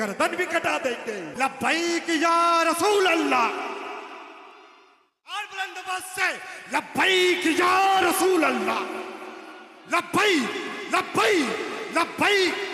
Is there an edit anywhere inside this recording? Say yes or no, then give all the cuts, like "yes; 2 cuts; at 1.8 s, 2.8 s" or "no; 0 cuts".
yes; 1 cut; at 1.3 s